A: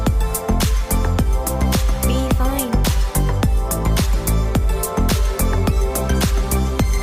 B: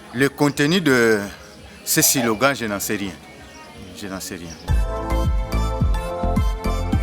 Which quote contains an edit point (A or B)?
B